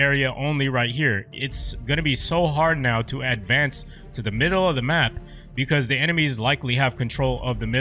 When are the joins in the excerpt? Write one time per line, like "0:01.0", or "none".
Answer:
none